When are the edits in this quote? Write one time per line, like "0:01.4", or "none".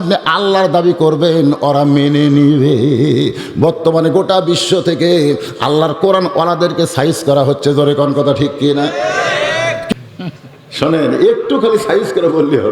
0:09.9